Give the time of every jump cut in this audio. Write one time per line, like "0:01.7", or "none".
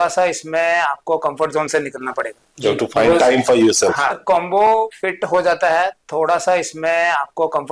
0:04.1